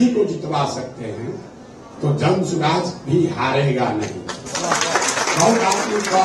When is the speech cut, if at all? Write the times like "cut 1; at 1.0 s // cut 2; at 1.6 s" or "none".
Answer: none